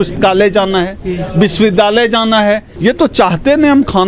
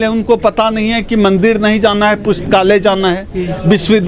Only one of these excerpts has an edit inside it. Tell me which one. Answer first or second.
first